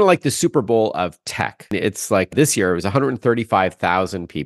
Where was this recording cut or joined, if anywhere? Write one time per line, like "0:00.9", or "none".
none